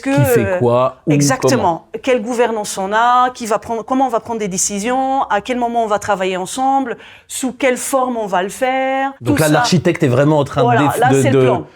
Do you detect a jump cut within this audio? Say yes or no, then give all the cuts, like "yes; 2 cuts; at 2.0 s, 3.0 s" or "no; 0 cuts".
yes; 1 cut; at 9.1 s